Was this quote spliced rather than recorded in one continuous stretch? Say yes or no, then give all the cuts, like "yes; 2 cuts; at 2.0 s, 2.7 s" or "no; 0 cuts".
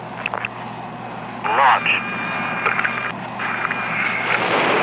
no; 0 cuts